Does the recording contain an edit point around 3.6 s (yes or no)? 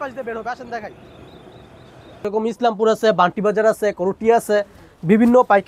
no